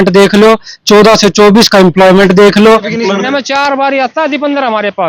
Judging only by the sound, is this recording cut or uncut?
cut